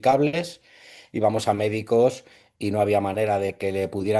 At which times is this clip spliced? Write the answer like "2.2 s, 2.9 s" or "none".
none